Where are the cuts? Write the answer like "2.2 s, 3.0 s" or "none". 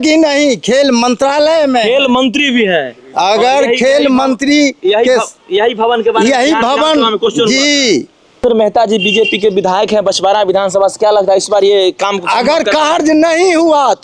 8.4 s